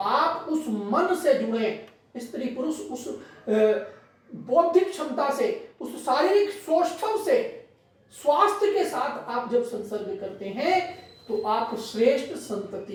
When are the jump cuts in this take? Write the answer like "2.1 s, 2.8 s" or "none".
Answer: none